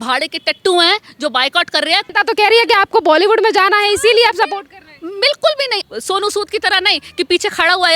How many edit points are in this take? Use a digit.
2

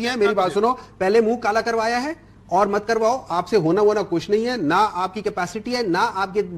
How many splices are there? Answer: 0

